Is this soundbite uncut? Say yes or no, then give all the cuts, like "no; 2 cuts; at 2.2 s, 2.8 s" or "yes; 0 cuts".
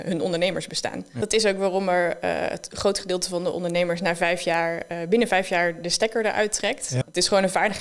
no; 2 cuts; at 1.1 s, 7.0 s